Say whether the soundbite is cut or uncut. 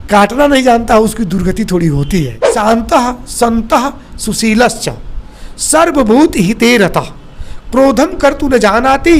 cut